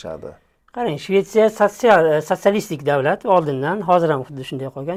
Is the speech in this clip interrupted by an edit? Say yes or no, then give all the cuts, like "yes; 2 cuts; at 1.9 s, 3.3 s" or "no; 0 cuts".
no; 0 cuts